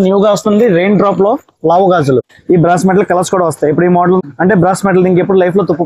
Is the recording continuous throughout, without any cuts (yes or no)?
no